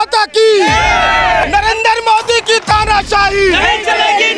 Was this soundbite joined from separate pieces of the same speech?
yes; 1 cut; at 1.4 s

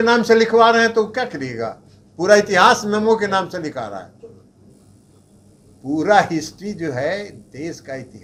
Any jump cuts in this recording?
no; 0 cuts

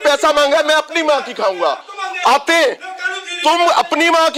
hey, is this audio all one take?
yes; 0 cuts

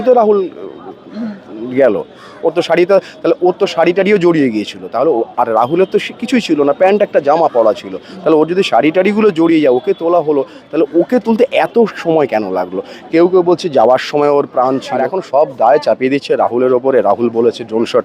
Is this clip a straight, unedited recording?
no; 1 cut; at 14.9 s

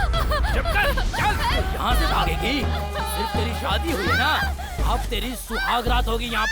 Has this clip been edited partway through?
yes; 1 cut; at 1.6 s

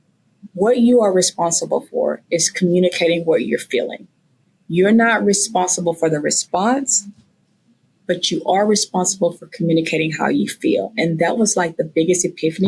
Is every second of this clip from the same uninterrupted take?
yes; 0 cuts

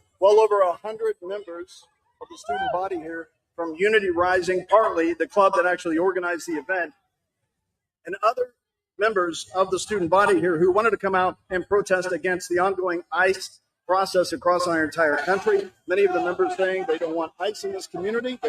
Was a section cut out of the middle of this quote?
yes; 1 cut; at 17.3 s

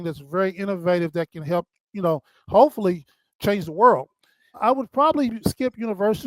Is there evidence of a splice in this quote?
yes; 2 cuts; at 3.3 s, 4.6 s

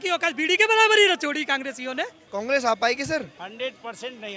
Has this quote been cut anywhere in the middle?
yes; 2 cuts; at 2.2 s, 3.4 s

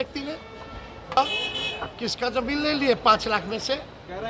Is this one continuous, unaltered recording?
no; 1 cut; at 1.2 s

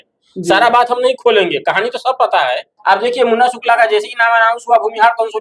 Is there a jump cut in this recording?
yes; 1 cut; at 2.7 s

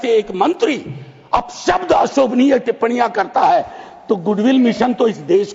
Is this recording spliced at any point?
no; 0 cuts

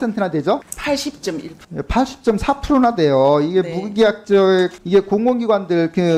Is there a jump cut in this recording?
no; 0 cuts

